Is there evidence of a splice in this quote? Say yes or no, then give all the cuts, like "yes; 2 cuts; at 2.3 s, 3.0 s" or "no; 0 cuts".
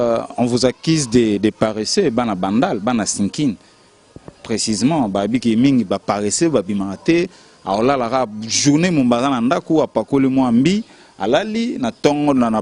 no; 0 cuts